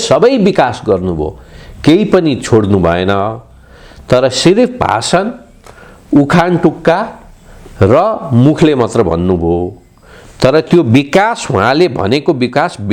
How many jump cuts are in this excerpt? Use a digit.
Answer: 0